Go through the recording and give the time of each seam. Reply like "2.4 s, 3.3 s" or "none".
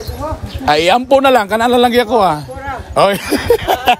none